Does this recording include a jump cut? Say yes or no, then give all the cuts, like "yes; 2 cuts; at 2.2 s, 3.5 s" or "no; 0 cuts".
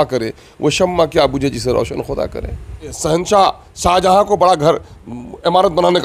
yes; 1 cut; at 2.9 s